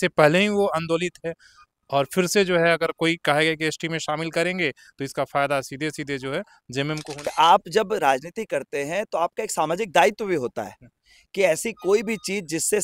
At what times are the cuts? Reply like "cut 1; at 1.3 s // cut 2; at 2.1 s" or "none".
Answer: cut 1; at 7.3 s